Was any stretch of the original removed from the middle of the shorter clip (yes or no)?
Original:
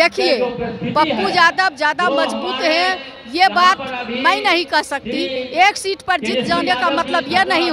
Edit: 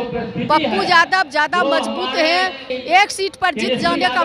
yes